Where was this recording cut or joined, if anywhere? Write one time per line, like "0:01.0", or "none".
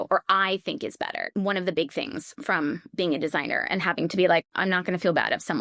0:00.9
0:04.5